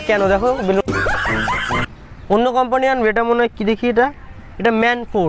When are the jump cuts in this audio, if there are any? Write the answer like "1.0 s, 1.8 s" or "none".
1.9 s